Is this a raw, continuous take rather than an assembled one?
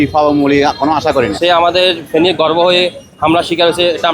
no; 1 cut; at 1.3 s

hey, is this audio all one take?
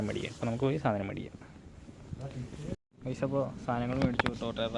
yes; 0 cuts

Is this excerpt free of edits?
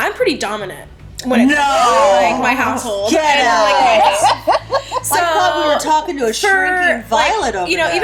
yes; 0 cuts

